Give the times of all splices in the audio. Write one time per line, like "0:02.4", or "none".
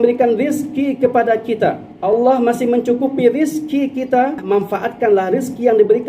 0:01.9
0:04.4